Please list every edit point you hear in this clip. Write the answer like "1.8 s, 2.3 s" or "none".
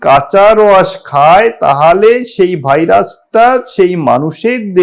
none

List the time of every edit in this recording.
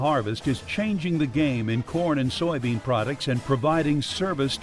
none

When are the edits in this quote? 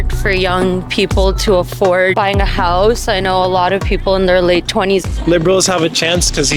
2.1 s, 5.1 s

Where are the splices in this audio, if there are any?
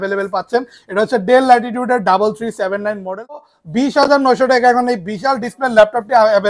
3.5 s

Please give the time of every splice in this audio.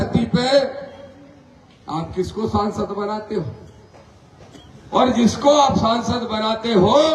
none

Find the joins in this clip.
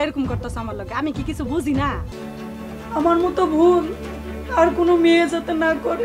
2.1 s

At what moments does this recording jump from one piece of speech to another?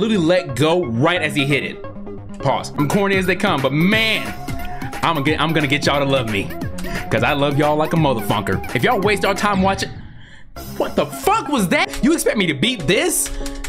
2.7 s, 11.9 s

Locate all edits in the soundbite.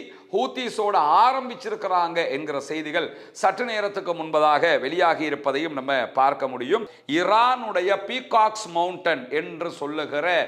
6.9 s

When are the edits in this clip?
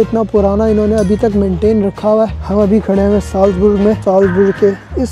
2.3 s, 4.0 s

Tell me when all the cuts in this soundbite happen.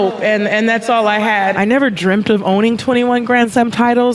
1.5 s

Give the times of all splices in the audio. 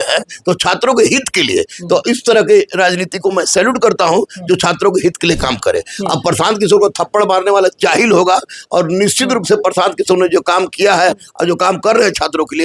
none

